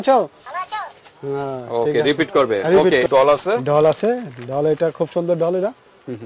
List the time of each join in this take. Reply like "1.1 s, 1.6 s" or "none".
3.1 s